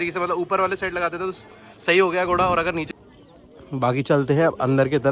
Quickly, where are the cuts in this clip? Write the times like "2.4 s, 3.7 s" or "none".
2.9 s